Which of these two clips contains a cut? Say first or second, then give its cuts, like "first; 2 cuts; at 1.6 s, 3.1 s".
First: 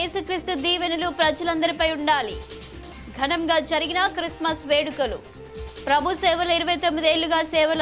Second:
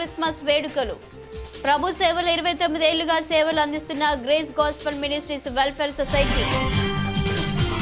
second; 1 cut; at 6.3 s